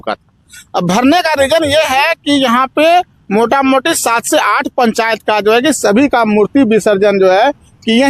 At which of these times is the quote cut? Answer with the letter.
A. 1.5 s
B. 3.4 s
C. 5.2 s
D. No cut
D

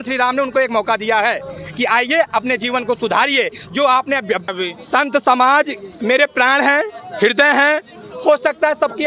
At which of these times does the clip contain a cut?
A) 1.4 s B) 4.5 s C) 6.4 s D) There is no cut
B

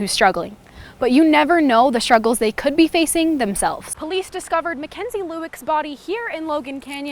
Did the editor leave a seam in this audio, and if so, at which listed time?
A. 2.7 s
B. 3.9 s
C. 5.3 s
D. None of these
B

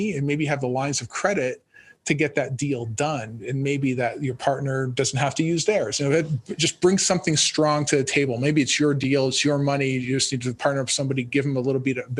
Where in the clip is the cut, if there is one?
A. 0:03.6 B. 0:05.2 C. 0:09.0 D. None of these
D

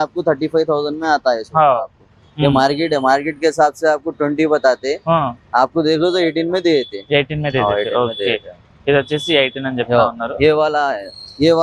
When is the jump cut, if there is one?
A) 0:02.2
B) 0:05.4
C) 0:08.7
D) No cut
D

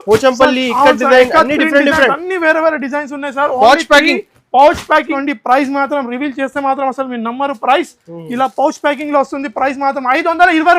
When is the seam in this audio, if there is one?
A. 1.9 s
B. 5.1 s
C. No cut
B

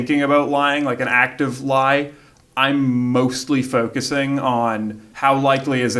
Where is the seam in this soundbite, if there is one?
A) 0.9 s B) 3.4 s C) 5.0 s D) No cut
C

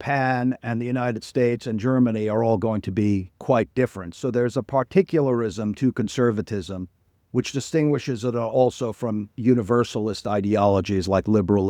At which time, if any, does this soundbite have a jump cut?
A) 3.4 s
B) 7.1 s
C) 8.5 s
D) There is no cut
D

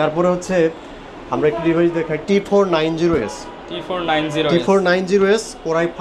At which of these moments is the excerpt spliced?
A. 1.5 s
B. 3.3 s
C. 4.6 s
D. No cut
D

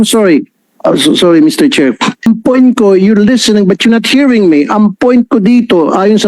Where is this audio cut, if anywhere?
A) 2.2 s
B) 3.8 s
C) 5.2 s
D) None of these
A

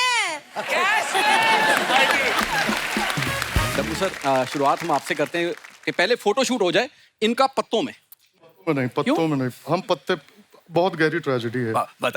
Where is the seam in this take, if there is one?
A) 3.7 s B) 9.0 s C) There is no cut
A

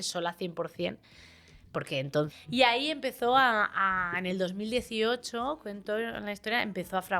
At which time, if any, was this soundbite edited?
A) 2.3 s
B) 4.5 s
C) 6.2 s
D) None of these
A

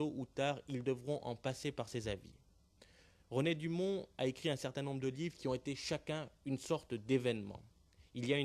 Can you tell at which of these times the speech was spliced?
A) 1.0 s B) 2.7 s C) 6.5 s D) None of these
C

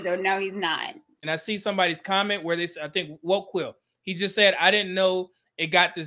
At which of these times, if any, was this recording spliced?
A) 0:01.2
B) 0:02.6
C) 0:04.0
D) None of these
A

